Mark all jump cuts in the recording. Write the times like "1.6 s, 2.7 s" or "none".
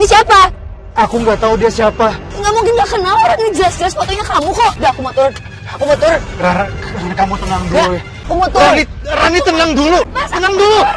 8.2 s, 10.1 s